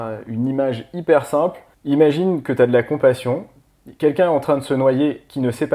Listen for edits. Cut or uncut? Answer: cut